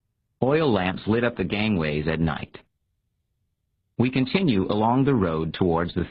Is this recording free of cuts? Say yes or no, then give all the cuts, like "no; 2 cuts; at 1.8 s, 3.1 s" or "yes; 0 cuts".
yes; 0 cuts